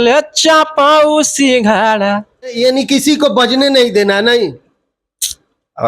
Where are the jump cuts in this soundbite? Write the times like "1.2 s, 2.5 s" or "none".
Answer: 2.5 s